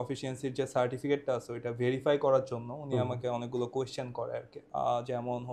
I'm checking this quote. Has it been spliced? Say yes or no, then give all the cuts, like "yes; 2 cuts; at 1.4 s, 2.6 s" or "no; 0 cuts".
yes; 1 cut; at 4.6 s